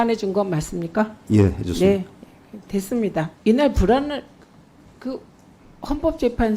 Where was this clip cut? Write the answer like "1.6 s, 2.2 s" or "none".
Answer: 3.3 s